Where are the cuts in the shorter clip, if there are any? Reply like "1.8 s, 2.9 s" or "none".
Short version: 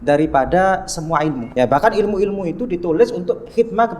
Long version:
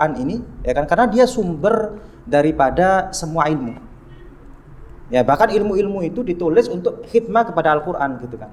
1.4 s